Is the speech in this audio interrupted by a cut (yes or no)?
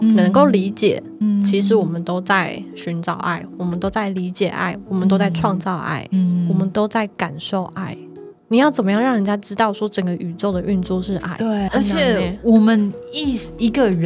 no